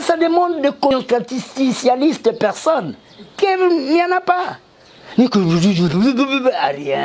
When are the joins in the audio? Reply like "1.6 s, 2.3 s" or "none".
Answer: 0.9 s

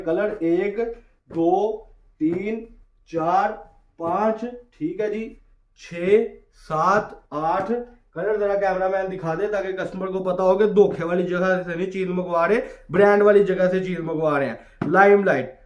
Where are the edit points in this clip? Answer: none

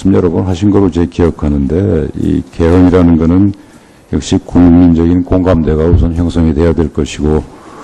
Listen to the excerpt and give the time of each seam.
5.9 s

